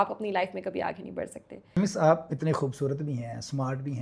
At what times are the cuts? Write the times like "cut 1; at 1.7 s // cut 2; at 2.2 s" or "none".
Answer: cut 1; at 1.8 s